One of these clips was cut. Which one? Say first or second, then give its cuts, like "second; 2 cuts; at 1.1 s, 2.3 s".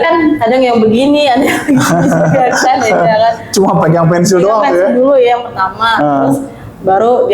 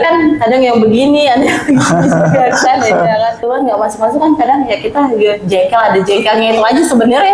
second; 1 cut; at 3.4 s